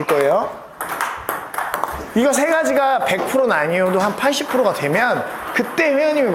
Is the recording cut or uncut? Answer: uncut